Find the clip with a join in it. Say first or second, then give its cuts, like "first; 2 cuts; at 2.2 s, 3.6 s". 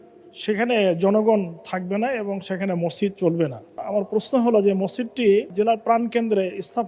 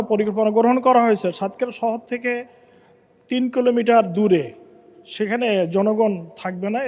first; 2 cuts; at 3.8 s, 5.5 s